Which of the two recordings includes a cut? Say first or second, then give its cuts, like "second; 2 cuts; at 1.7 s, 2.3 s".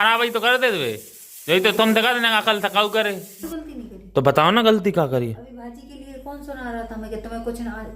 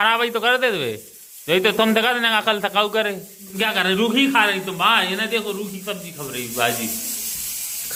first; 1 cut; at 3.4 s